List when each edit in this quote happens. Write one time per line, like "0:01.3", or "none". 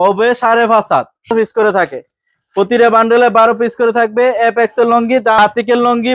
0:01.3
0:05.4